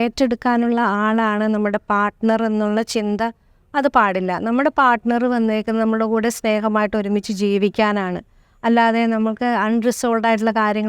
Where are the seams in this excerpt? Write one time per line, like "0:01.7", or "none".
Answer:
none